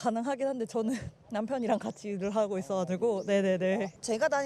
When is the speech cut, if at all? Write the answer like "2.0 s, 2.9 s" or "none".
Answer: none